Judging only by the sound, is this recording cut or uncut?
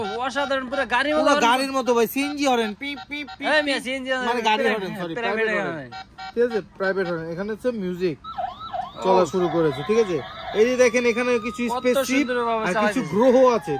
uncut